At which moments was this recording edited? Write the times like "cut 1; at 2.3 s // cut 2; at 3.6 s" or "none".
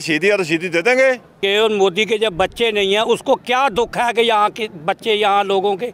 cut 1; at 1.4 s